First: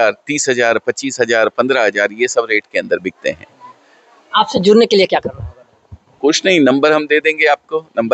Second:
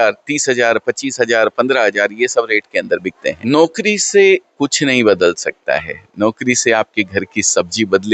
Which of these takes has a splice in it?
second; 1 cut; at 3.5 s

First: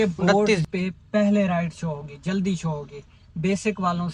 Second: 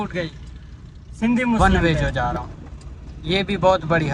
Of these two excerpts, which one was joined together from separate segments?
second; 1 cut; at 1.6 s

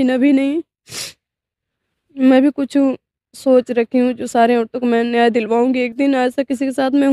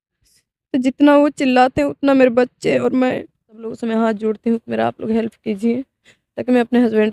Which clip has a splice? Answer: second; 1 cut; at 3.7 s

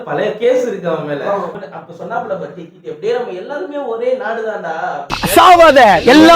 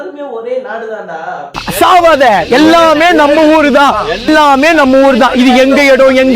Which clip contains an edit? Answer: first; 1 cut; at 1.6 s

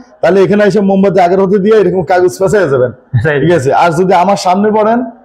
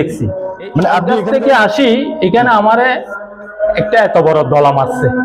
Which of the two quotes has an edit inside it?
second; 1 cut; at 1.1 s

